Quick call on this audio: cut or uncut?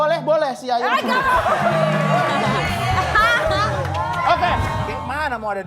cut